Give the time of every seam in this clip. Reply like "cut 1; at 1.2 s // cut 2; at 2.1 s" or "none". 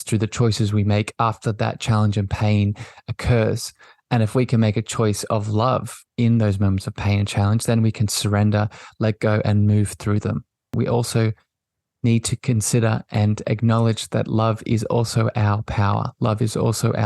cut 1; at 10.7 s